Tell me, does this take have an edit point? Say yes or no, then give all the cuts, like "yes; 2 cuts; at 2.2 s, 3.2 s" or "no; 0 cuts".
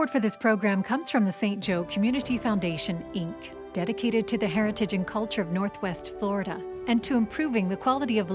no; 0 cuts